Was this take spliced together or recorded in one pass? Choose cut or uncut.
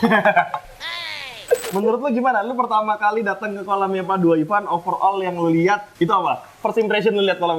cut